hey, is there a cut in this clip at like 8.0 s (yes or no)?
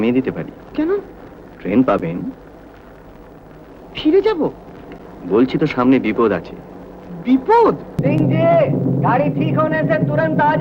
yes